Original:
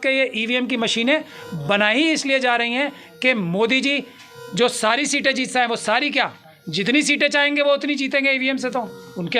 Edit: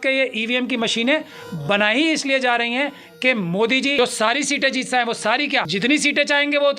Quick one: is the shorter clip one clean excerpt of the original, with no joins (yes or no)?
no